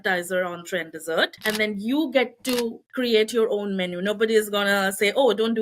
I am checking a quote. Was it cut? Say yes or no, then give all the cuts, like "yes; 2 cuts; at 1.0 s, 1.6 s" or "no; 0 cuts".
yes; 2 cuts; at 1.4 s, 2.8 s